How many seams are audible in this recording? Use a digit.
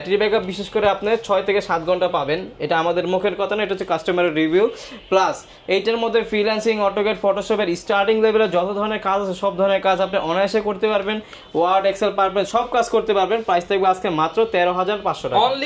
0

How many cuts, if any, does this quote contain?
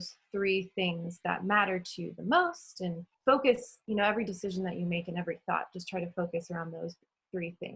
2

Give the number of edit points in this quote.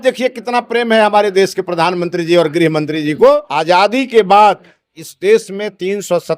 1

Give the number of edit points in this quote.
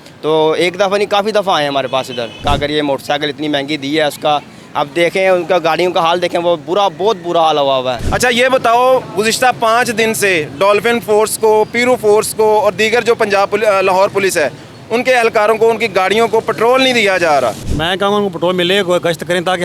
3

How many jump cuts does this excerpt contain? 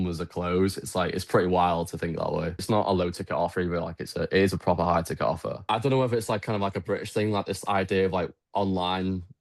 2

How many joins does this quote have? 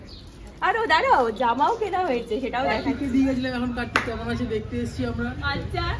1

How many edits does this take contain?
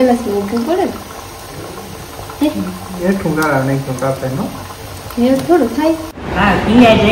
1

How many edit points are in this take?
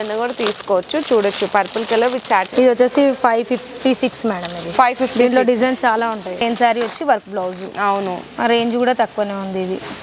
2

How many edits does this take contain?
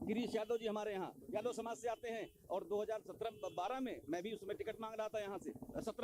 0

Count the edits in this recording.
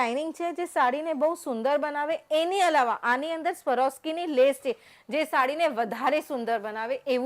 0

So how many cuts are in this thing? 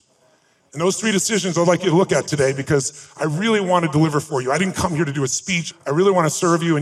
1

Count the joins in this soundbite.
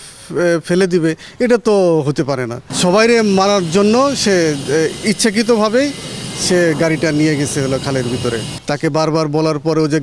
2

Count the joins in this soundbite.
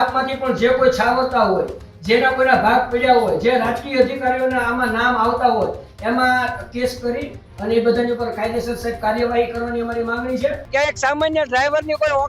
1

